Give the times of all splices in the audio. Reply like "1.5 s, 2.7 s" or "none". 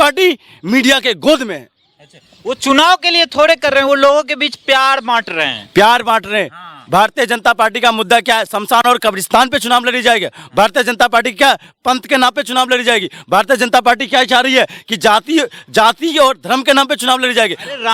none